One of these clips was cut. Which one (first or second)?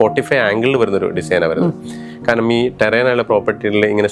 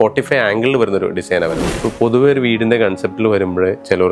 second